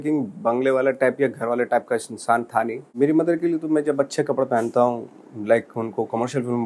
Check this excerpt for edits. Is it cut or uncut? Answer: cut